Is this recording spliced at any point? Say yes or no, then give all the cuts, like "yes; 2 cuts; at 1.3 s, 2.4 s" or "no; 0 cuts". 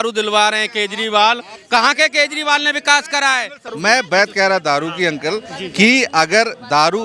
yes; 1 cut; at 3.7 s